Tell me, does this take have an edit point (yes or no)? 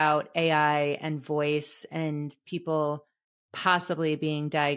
no